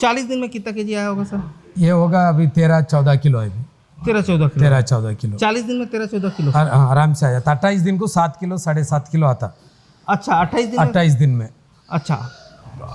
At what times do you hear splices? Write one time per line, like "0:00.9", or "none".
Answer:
none